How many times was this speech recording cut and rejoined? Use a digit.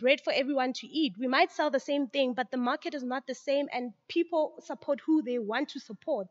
0